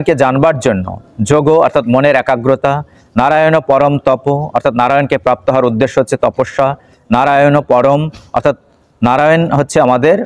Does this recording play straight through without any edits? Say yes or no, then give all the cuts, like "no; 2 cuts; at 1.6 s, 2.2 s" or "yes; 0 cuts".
yes; 0 cuts